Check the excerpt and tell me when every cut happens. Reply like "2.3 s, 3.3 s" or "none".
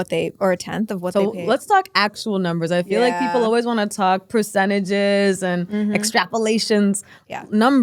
none